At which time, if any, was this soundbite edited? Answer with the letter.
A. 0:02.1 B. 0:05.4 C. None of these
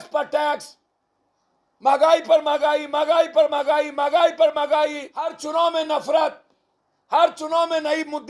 B